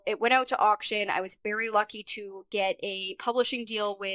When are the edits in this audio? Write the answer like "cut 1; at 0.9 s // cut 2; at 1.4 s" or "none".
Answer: none